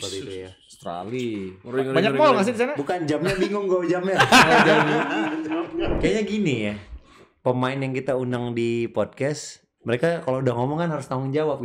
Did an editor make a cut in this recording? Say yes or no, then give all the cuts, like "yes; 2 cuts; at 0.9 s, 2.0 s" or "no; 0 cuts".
yes; 1 cut; at 5.9 s